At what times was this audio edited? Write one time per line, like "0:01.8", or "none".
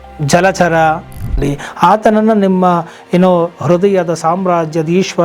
0:01.4